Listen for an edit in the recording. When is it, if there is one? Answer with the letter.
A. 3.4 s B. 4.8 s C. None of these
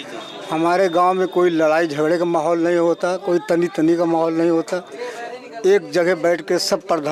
C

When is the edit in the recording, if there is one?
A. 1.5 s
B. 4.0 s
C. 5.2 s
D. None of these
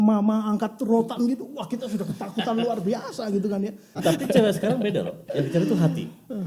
B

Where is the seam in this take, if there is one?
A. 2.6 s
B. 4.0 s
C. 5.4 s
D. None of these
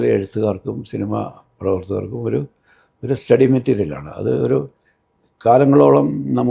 D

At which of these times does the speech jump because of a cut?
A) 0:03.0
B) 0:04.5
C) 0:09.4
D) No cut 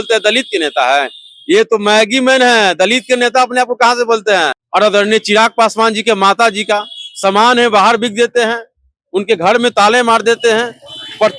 B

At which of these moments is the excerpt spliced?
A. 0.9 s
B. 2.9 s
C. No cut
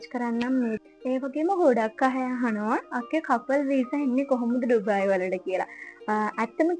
A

